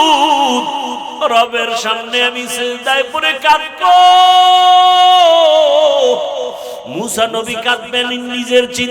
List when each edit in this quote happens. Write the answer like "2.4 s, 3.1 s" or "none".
1.1 s